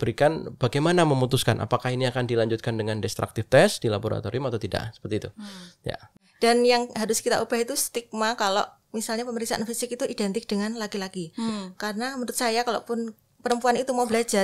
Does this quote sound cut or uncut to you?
cut